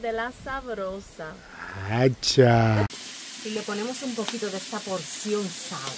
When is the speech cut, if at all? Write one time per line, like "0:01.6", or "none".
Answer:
0:02.9